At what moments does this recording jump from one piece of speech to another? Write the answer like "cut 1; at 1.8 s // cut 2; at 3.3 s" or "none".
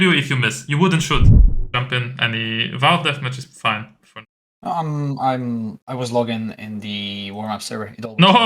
cut 1; at 1.4 s